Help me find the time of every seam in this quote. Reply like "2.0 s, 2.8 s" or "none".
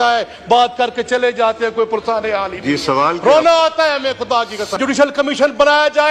4.8 s